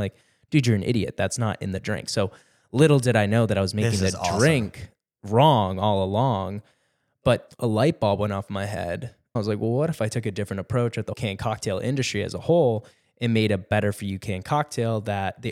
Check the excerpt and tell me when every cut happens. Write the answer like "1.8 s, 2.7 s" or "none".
7.5 s, 9.4 s, 11.1 s